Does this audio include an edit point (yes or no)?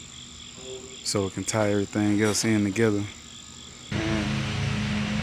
yes